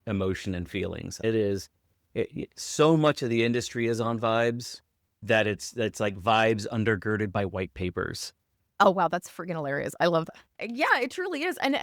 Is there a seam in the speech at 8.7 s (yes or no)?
yes